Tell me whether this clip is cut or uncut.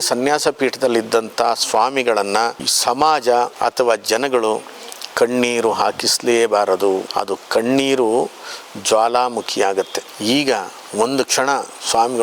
cut